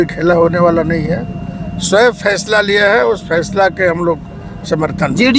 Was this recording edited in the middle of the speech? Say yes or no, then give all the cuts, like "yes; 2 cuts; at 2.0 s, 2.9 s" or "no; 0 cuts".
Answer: no; 0 cuts